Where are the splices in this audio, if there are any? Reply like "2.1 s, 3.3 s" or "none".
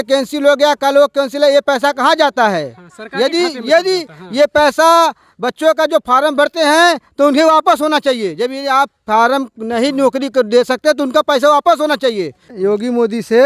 12.5 s